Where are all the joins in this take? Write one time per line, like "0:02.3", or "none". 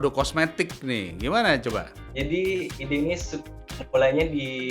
0:02.0